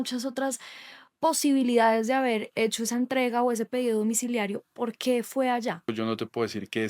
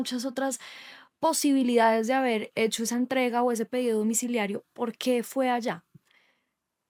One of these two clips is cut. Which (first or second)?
first